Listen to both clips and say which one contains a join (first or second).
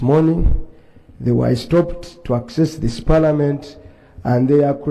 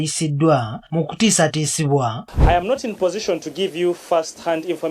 second